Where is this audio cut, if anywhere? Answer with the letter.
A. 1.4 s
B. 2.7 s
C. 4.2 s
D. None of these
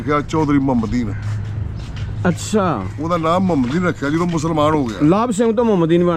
D